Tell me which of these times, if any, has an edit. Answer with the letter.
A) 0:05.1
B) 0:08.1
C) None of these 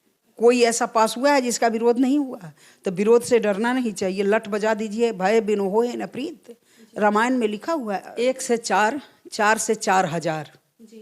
B